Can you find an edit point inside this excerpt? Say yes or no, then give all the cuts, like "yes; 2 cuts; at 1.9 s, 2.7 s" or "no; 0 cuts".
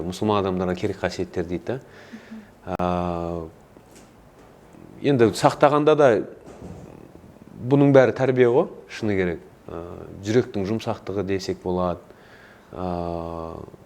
no; 0 cuts